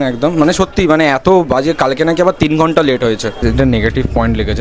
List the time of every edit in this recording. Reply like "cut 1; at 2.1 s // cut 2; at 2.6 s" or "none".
cut 1; at 3.4 s